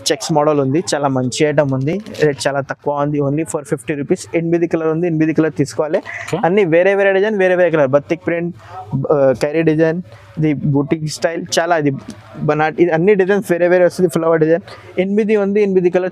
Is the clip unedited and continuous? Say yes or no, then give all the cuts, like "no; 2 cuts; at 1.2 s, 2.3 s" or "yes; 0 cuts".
yes; 0 cuts